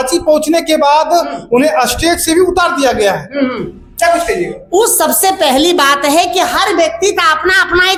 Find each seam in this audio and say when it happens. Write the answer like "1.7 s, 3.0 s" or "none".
none